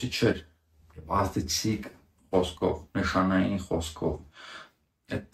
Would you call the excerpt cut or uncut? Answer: uncut